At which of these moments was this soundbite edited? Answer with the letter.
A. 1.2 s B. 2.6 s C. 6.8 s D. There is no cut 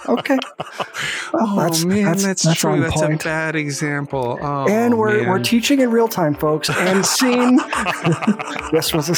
D